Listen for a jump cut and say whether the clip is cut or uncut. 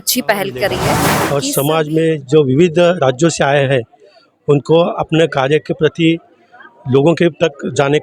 cut